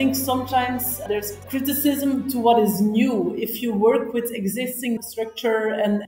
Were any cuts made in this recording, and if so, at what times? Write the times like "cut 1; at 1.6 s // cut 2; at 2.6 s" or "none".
cut 1; at 1.5 s